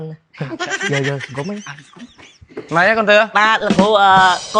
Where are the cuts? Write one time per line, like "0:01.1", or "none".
none